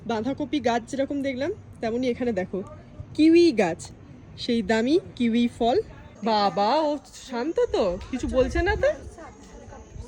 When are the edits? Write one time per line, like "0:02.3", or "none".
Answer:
0:06.0

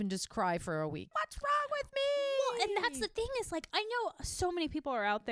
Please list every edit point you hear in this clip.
0:01.1
0:03.7

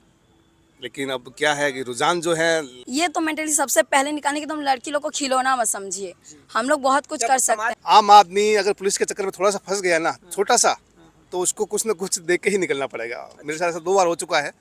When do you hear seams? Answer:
0:02.8
0:07.7

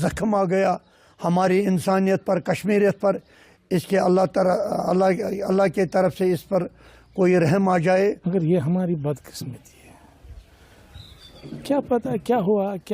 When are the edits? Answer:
0:08.2

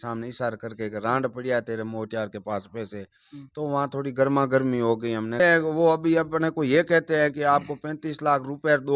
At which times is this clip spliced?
0:05.4

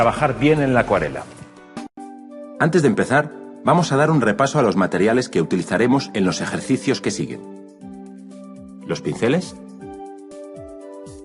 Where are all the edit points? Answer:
0:02.0

